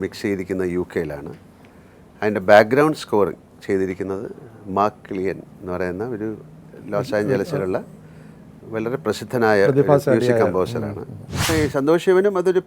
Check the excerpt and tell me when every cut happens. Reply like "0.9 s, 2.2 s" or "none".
11.5 s